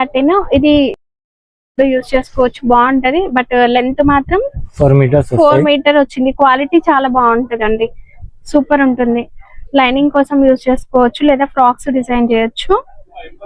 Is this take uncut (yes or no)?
yes